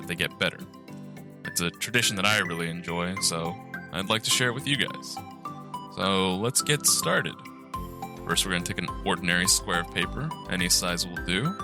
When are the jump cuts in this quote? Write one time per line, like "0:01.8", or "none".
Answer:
none